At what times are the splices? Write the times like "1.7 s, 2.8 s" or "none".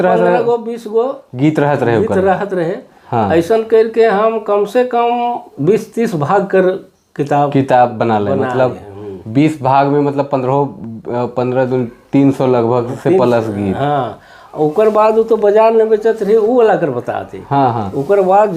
none